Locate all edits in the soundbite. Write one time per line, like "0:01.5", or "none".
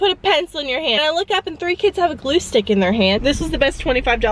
0:01.0
0:03.2